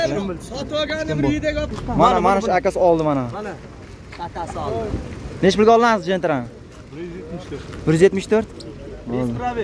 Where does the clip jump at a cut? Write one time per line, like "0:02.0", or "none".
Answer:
none